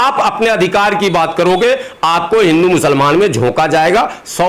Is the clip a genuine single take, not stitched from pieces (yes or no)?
yes